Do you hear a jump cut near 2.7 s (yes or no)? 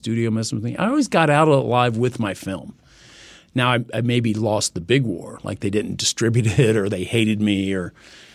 no